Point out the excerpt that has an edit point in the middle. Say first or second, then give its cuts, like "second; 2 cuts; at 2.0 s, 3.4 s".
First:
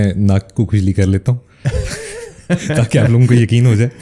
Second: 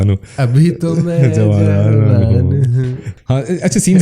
second; 1 cut; at 3.1 s